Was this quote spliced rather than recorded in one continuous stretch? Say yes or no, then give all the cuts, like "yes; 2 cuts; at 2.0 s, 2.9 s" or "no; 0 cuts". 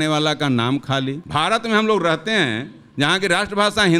yes; 1 cut; at 1.2 s